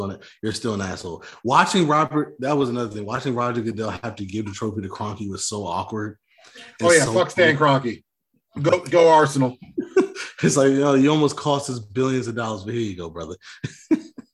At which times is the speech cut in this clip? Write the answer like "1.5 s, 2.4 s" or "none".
none